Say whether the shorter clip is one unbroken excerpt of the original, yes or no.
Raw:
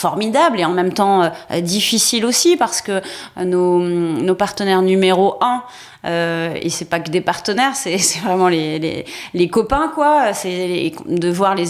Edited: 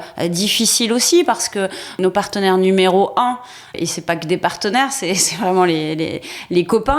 no